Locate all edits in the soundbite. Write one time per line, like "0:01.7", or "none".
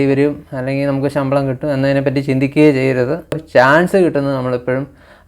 0:03.4